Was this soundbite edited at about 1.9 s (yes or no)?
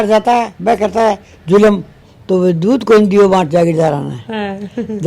yes